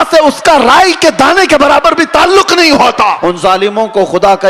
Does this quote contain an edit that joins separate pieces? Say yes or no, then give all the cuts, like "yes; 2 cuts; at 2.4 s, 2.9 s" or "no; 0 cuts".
yes; 1 cut; at 3.2 s